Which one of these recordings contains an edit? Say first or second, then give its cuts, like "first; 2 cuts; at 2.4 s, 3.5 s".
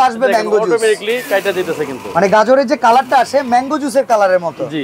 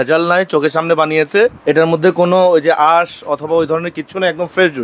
second; 1 cut; at 1.6 s